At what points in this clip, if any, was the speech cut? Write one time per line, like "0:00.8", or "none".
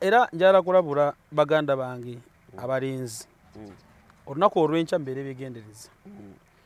none